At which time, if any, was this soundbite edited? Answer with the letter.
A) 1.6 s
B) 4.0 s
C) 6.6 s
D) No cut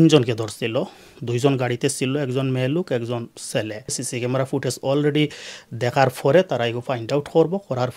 B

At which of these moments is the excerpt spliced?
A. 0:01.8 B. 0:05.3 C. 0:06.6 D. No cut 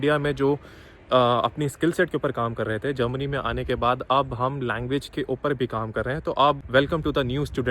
C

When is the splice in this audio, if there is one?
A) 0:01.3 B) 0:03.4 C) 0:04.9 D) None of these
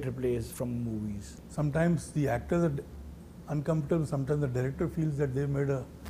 A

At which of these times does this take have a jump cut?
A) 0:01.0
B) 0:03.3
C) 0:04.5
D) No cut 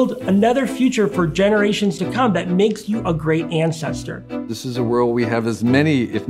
C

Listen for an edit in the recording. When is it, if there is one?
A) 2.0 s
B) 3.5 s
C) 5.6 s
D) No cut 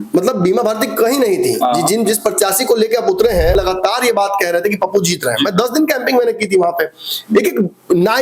B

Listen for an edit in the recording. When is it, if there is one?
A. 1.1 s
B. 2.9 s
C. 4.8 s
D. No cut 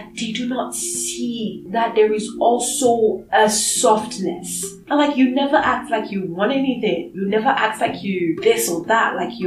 C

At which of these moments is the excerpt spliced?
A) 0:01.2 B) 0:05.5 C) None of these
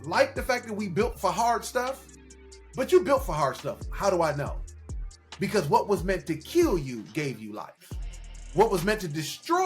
A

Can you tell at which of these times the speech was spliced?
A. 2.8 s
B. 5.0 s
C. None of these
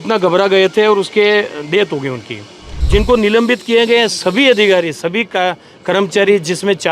A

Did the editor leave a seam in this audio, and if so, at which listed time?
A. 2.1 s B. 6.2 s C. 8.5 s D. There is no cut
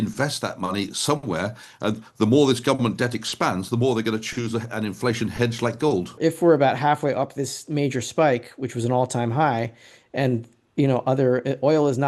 B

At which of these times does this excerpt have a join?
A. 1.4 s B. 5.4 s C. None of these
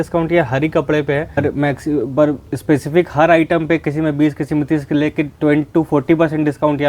A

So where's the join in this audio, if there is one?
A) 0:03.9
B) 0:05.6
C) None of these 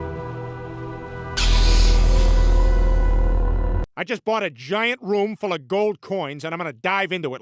A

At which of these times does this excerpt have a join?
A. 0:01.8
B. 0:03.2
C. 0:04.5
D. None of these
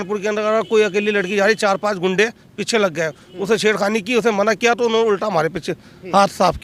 D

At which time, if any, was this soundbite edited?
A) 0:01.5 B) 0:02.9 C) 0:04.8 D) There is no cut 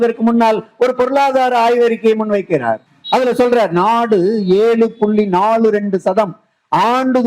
B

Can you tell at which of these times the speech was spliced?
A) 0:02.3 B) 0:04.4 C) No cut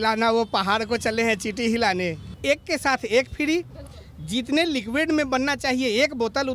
A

